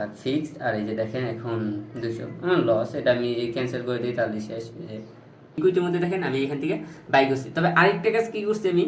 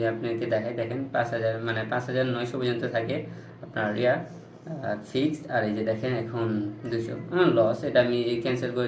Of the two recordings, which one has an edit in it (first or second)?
first